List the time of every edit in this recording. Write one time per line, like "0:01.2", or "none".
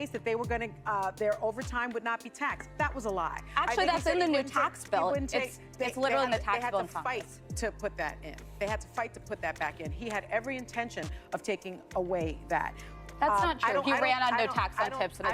none